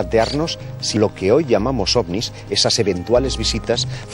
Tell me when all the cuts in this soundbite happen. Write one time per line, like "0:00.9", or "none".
0:00.9